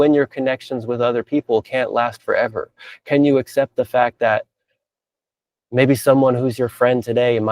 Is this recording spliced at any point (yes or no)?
no